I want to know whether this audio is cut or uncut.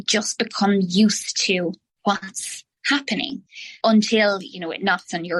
uncut